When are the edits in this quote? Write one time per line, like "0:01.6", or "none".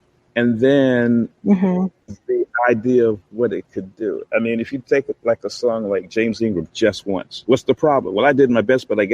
none